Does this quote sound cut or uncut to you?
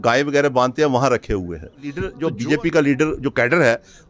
cut